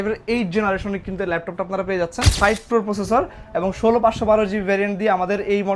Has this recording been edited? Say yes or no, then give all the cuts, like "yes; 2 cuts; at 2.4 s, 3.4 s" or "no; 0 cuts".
yes; 1 cut; at 2.3 s